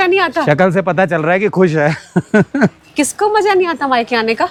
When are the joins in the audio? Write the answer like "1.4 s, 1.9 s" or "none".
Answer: none